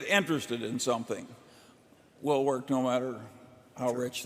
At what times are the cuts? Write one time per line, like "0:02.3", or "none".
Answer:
none